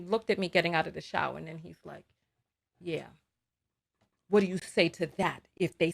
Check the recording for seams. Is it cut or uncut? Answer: cut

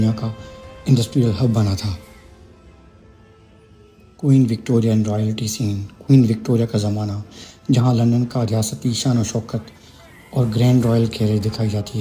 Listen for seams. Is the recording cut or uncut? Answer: uncut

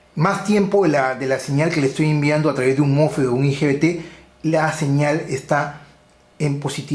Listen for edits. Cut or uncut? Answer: uncut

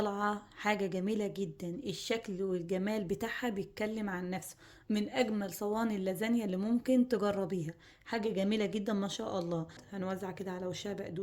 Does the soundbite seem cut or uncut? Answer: cut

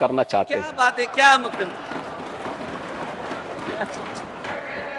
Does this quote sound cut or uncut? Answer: uncut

